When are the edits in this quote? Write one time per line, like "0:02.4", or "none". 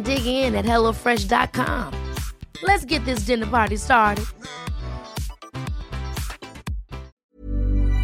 0:07.1